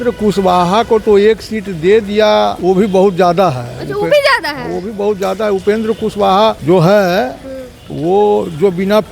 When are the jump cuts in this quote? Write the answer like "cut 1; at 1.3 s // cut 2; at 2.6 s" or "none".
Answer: cut 1; at 2.6 s // cut 2; at 6.6 s